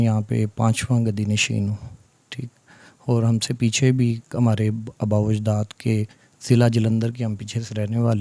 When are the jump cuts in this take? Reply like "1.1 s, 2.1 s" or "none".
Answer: none